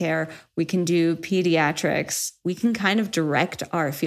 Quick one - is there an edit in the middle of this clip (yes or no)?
yes